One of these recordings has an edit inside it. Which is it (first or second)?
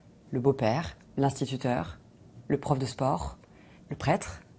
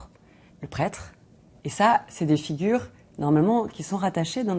first